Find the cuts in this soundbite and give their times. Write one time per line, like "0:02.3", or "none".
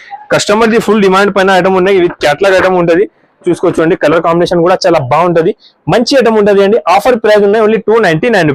none